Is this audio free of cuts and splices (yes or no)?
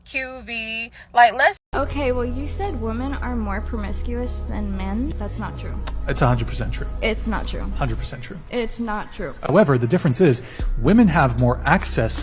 no